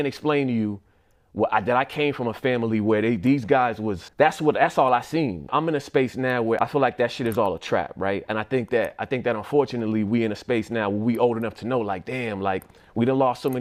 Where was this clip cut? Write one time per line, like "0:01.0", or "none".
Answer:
none

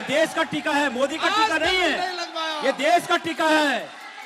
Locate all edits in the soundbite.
none

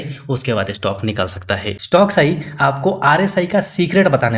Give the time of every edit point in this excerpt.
0:01.7

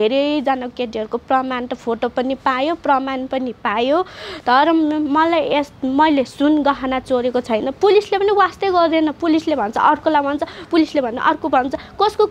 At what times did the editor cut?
none

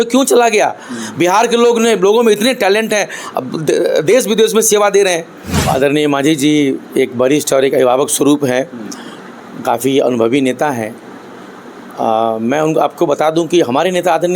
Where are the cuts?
0:05.6

